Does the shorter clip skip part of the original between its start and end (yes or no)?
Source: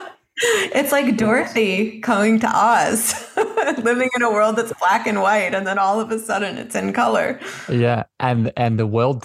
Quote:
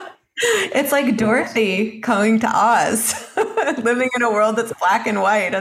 no